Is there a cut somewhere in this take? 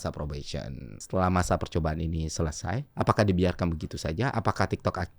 yes; 2 cuts; at 1.0 s, 2.9 s

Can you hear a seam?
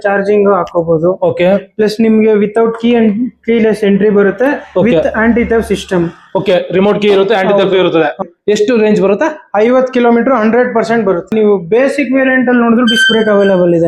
yes; 2 cuts; at 8.2 s, 11.3 s

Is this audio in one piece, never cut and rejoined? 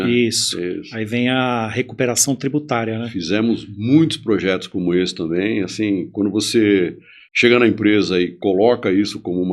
yes; 0 cuts

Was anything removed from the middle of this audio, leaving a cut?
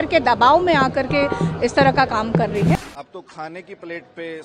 yes; 1 cut; at 2.8 s

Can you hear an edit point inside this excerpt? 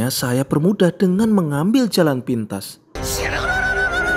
no; 0 cuts

